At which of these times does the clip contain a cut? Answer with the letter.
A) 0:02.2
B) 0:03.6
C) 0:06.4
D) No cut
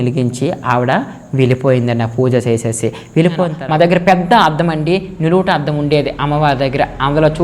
B